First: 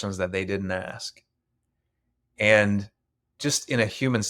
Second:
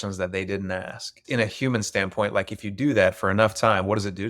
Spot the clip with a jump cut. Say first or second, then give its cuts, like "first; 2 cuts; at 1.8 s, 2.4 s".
second; 1 cut; at 1.2 s